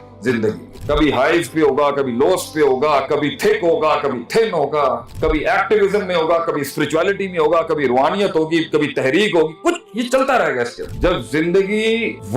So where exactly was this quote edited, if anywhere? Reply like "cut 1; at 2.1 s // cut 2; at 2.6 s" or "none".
cut 1; at 10.9 s